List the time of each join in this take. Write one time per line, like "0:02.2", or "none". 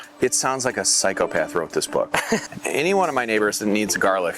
0:02.5